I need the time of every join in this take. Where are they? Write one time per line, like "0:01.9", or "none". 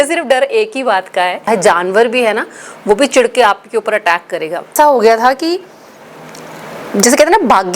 0:01.5
0:04.7